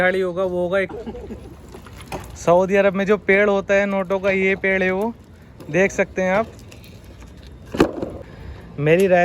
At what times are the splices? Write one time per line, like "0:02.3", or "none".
0:00.9
0:08.3